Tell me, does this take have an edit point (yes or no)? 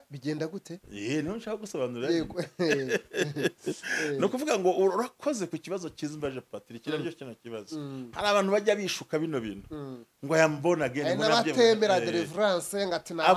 no